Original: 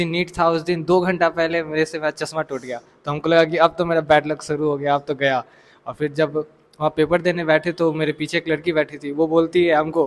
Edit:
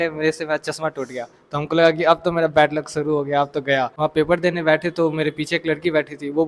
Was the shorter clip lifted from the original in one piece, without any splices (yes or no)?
no